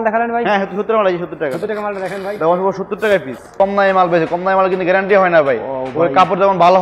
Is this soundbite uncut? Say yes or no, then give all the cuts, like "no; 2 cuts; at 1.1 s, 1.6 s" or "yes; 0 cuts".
no; 1 cut; at 3.5 s